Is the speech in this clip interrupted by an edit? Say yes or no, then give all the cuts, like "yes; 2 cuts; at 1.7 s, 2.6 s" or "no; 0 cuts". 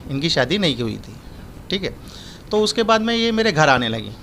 no; 0 cuts